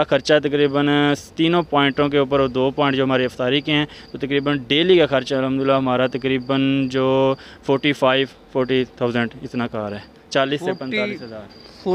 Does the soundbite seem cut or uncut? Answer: uncut